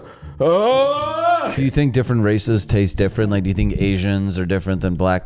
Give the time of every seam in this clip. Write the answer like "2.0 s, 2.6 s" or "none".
1.5 s